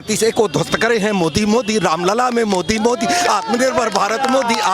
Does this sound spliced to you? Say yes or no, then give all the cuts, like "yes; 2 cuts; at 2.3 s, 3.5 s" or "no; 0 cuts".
no; 0 cuts